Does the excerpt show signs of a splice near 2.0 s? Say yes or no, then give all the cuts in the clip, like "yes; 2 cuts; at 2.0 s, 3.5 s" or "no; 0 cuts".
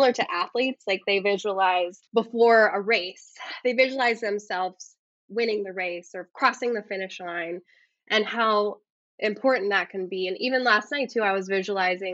yes; 1 cut; at 2.0 s